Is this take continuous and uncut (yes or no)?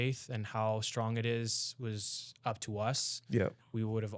yes